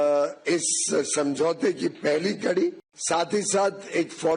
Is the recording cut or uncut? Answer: cut